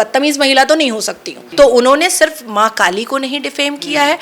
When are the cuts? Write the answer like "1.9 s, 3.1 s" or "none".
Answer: 1.4 s